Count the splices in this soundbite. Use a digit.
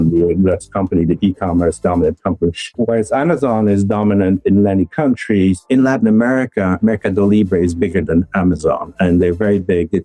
2